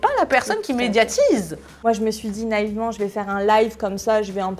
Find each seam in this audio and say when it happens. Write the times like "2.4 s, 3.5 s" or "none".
1.6 s

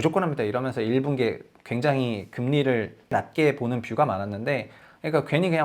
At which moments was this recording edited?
3.1 s

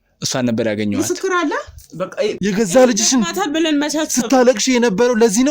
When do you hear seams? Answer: 2.4 s

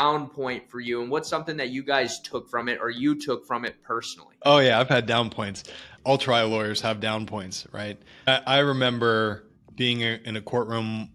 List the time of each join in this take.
4.2 s, 8.3 s

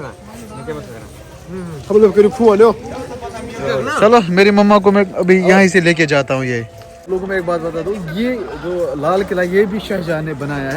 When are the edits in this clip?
7.0 s

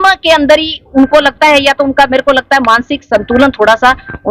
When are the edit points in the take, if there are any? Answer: none

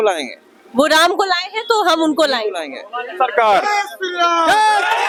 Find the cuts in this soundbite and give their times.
none

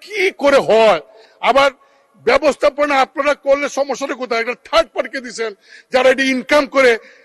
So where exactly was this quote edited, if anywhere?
none

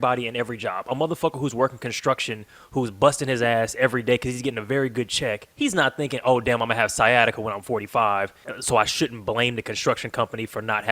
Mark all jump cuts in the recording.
5.5 s, 8.5 s

